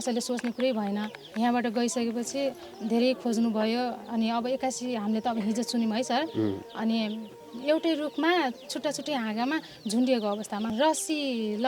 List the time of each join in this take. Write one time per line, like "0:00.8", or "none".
0:01.2
0:07.5
0:10.7